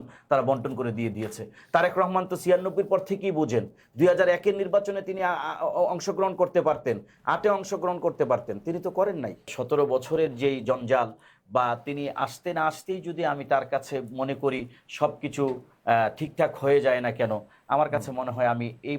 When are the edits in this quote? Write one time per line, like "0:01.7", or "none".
0:09.5